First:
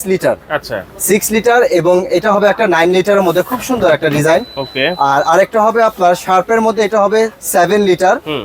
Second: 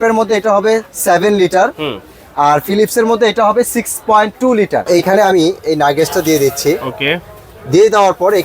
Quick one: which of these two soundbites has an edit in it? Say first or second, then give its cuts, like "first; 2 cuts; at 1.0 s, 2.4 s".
second; 1 cut; at 4.9 s